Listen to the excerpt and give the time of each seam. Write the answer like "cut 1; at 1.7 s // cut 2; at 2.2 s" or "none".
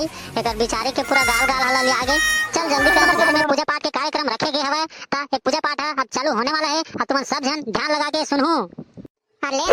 cut 1; at 3.0 s